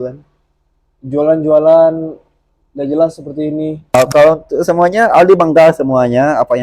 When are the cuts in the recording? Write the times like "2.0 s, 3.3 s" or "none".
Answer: 4.0 s